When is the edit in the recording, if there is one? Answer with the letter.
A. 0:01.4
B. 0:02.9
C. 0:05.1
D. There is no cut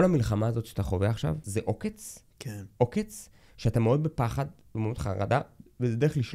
A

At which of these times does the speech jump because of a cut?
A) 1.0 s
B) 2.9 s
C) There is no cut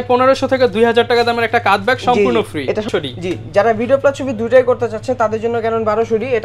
B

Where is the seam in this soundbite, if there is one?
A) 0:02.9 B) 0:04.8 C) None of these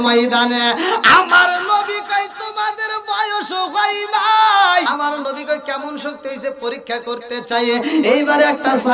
B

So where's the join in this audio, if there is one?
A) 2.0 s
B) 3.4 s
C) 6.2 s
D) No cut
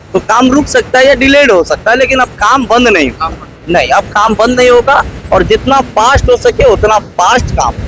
D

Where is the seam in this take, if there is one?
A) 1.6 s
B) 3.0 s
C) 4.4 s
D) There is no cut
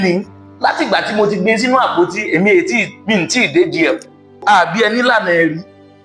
C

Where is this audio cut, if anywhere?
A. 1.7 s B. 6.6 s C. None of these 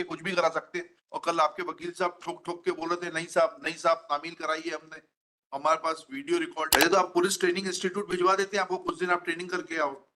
B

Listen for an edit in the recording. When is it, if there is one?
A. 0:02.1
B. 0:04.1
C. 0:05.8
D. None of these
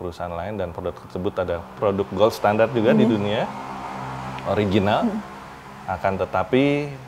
D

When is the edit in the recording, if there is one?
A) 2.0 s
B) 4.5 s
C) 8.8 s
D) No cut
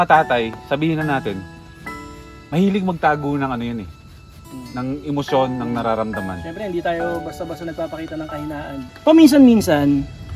C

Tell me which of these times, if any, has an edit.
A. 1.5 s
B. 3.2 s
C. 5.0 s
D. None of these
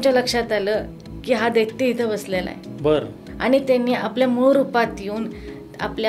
B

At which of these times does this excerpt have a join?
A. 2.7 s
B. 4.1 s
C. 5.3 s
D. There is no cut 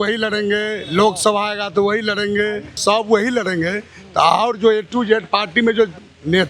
A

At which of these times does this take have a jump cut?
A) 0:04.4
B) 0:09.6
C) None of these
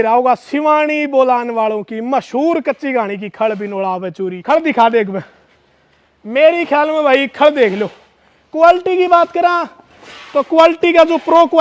A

